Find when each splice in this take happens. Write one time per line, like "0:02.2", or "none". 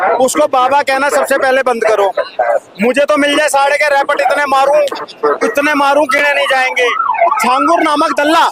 0:07.4